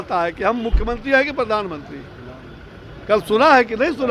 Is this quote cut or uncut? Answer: uncut